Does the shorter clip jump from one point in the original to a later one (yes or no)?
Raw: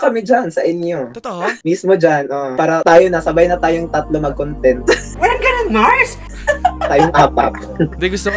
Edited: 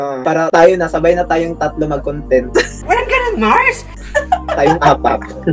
no